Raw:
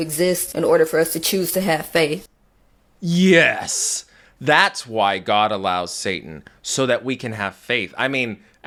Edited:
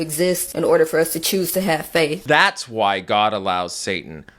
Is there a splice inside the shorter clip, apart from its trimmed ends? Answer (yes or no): yes